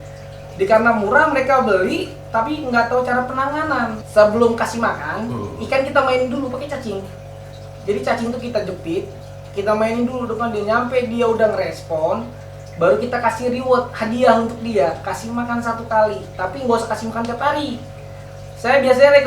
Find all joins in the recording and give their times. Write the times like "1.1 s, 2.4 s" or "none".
4.0 s